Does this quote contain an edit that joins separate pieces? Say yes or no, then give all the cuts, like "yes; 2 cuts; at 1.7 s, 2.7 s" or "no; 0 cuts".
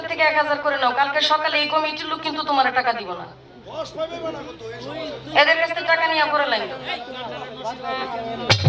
no; 0 cuts